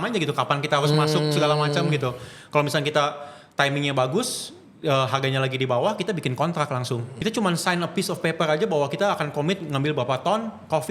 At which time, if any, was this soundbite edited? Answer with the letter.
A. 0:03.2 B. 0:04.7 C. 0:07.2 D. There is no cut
C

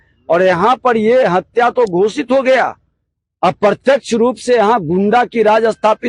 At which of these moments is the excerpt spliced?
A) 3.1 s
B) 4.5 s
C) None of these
C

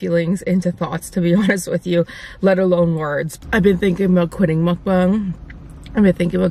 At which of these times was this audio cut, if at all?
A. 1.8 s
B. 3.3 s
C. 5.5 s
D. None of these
B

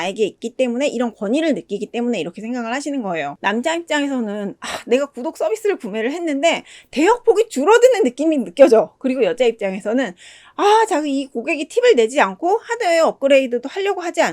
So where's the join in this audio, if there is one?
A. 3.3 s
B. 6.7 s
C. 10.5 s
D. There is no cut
A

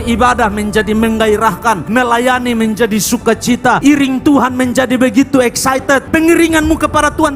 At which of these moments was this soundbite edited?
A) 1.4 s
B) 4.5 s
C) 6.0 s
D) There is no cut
C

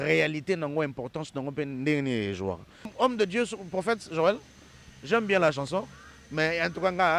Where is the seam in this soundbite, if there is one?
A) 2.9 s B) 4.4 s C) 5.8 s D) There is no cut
A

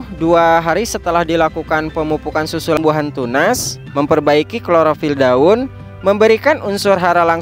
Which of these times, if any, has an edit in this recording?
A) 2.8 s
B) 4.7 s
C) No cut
A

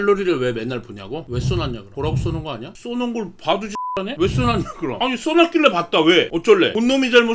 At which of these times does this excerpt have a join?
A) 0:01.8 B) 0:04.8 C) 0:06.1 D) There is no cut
D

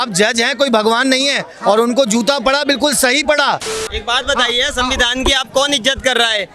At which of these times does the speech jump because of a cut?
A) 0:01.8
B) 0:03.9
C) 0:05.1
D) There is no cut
B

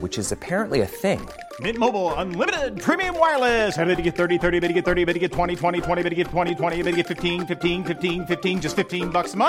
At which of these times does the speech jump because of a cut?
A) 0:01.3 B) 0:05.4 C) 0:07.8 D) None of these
D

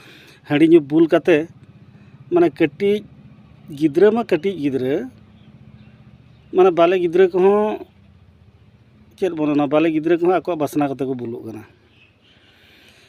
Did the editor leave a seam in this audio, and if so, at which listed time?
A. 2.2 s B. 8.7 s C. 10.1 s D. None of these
D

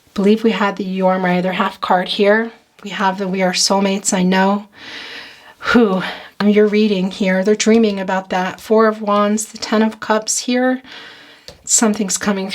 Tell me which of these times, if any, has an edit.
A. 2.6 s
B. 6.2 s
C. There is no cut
B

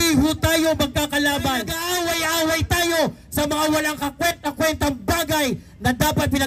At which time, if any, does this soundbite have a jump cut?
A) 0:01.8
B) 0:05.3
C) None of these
A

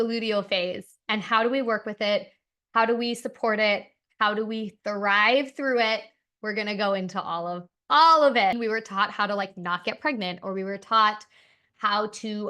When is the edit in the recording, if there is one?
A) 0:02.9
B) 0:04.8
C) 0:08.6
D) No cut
C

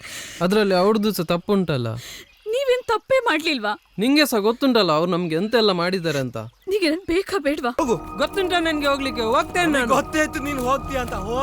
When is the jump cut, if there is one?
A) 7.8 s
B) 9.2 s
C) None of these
A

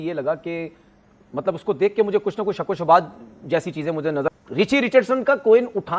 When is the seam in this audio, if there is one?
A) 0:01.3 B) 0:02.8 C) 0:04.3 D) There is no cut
C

